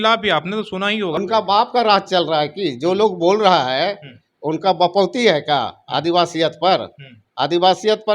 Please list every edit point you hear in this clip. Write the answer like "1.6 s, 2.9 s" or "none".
1.2 s